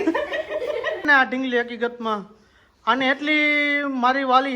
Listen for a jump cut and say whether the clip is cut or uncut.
cut